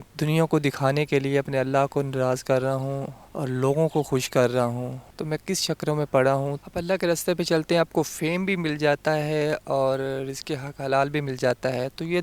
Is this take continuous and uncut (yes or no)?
yes